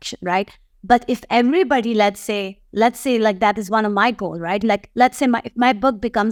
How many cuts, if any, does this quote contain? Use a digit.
0